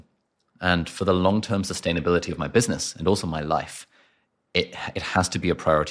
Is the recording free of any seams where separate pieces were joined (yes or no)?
yes